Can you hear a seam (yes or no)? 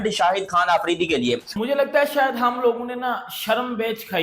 yes